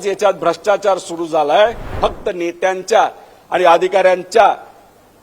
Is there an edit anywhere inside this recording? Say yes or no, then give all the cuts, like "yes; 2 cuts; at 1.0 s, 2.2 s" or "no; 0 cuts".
yes; 1 cut; at 2.0 s